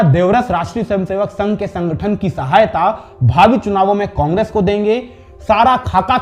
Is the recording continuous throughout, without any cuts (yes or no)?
yes